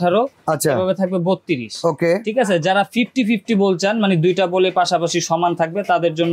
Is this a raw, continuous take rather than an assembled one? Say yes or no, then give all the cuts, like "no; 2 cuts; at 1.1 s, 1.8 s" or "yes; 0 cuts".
yes; 0 cuts